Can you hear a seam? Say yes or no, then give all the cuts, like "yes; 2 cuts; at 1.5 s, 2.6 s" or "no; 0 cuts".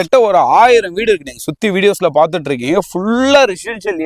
no; 0 cuts